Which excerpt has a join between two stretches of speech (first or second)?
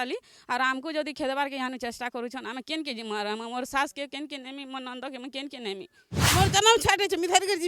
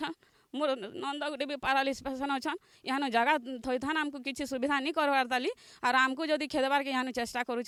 first